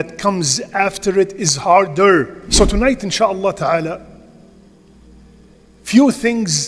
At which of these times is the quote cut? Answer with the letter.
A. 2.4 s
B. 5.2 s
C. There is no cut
A